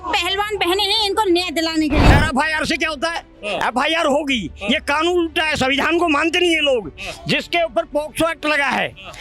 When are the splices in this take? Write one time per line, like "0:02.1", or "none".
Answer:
0:02.1